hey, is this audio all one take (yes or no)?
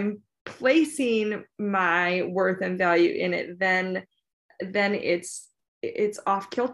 yes